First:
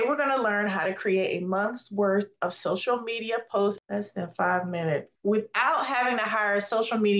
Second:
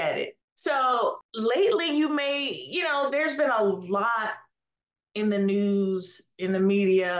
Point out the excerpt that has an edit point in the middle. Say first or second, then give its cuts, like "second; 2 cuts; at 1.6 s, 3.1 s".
first; 2 cuts; at 3.8 s, 5.1 s